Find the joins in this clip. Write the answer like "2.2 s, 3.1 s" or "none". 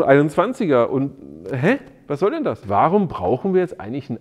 2.6 s